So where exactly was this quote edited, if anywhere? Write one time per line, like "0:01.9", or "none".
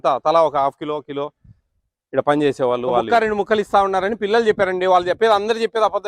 0:03.1